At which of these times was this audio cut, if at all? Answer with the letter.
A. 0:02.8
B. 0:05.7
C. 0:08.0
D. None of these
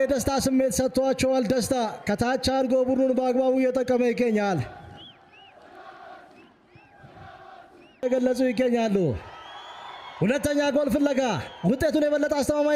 C